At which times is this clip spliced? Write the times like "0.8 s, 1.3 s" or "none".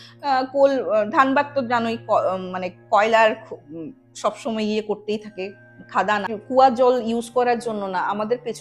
6.3 s